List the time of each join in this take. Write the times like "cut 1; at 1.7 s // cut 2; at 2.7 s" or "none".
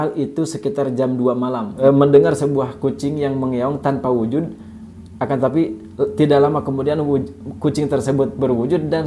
cut 1; at 1.7 s